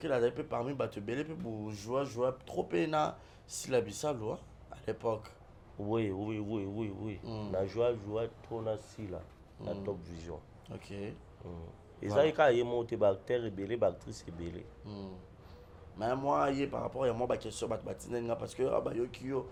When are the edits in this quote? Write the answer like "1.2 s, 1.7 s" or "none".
none